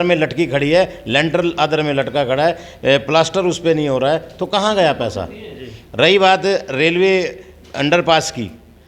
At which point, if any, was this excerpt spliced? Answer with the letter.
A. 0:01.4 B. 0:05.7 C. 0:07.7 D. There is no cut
D